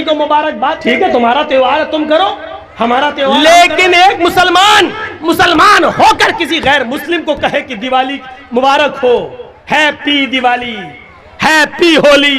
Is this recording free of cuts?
no; 2 cuts; at 0.8 s, 3.4 s

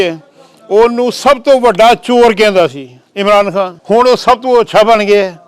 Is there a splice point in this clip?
yes; 1 cut; at 3.8 s

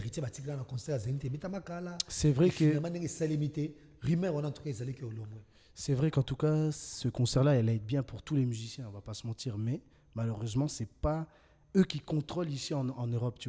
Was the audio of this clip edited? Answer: no; 0 cuts

